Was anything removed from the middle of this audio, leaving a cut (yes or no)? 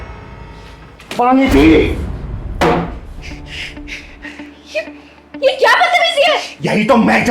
yes